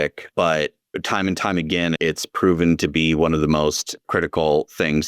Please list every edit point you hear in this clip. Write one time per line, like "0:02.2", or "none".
0:04.1